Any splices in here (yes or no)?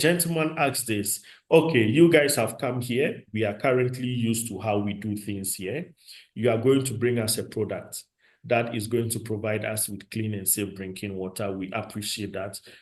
no